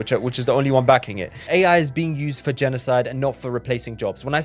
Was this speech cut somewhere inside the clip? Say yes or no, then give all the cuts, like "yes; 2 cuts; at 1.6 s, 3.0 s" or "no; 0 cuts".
yes; 1 cut; at 1.4 s